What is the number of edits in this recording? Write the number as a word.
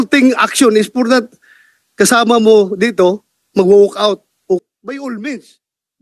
one